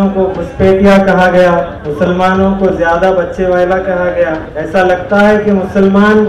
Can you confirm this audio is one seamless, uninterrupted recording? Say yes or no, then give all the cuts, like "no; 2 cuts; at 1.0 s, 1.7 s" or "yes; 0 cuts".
no; 2 cuts; at 1.8 s, 4.5 s